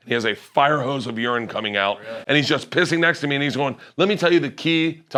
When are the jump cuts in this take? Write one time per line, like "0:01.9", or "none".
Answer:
none